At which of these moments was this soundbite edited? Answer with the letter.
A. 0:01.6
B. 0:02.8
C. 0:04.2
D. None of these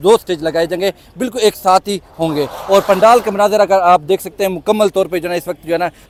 D